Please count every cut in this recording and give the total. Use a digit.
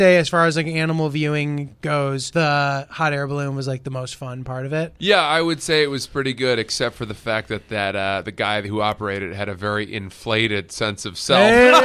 1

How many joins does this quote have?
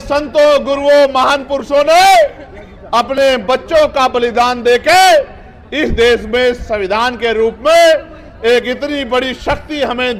0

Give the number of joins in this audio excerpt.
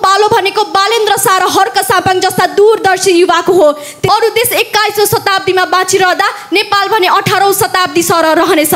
1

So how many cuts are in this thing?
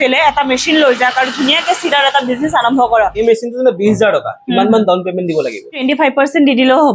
2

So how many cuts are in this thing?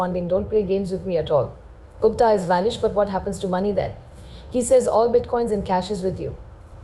0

